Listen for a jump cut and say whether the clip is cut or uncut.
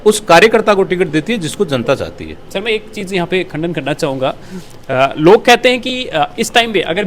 uncut